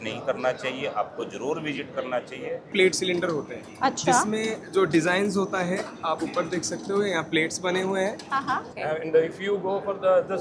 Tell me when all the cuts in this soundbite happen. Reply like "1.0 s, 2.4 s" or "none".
2.7 s, 8.7 s